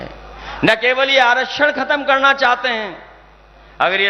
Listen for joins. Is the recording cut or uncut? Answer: uncut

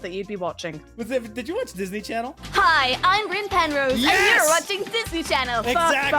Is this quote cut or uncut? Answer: uncut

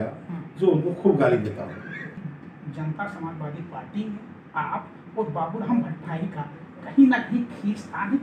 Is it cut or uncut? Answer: cut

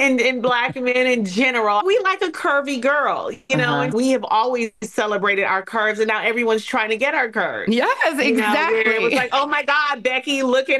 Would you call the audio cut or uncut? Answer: cut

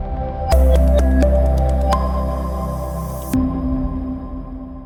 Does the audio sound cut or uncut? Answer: uncut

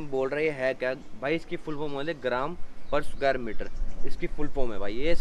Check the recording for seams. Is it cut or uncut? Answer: uncut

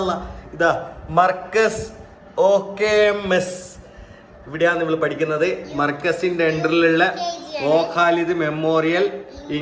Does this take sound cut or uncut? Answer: uncut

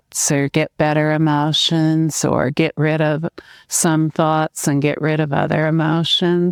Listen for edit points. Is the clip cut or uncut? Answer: uncut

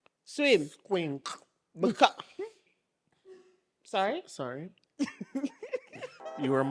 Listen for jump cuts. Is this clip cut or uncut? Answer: cut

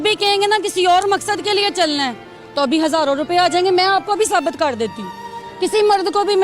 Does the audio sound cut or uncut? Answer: uncut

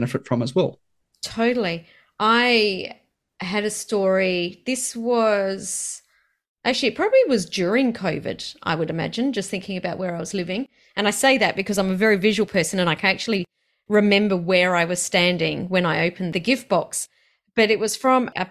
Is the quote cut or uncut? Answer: uncut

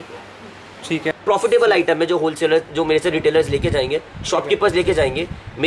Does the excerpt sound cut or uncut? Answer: cut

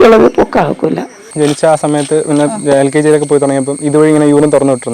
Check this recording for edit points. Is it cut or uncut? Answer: cut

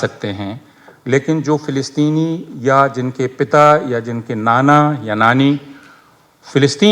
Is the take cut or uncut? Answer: uncut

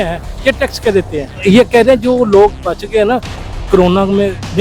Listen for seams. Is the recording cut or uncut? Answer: cut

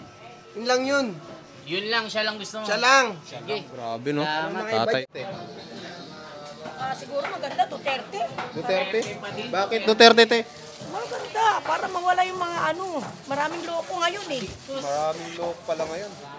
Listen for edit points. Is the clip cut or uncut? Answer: cut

